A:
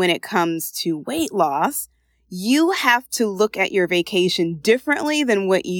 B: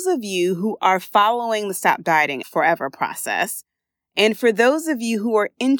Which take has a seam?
B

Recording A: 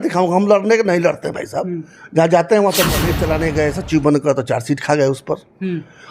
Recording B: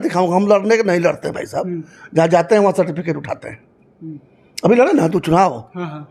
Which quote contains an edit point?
A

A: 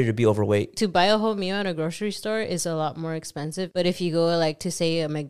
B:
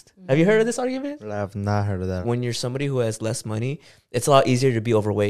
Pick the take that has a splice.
B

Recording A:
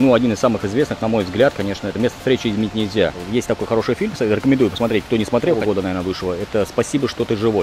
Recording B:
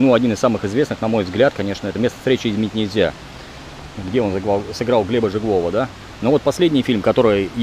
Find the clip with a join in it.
A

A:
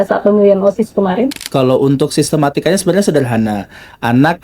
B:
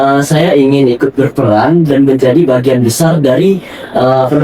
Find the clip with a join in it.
A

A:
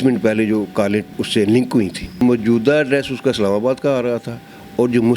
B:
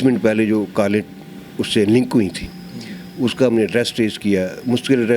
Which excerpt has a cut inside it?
A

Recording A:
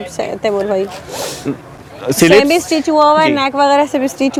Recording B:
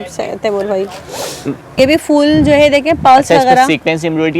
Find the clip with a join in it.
B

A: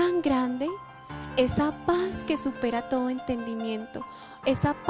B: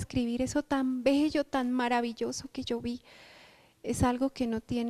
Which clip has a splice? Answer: A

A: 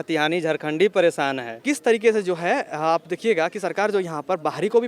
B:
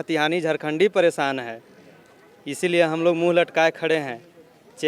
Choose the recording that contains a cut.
A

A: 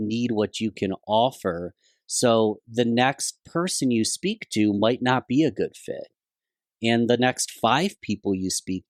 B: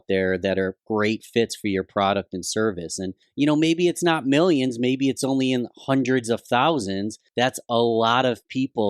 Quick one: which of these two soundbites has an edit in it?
B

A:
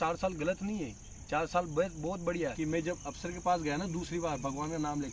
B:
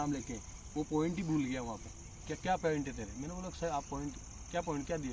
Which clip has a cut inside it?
A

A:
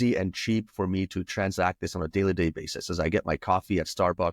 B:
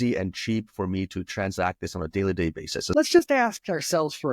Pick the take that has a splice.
B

